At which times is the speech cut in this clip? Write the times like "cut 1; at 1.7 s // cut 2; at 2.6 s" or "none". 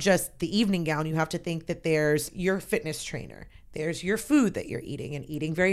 cut 1; at 2.3 s